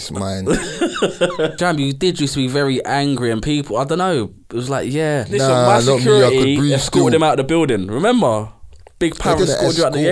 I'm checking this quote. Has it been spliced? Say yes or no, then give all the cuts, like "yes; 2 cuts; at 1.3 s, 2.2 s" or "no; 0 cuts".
yes; 2 cuts; at 1.5 s, 5.3 s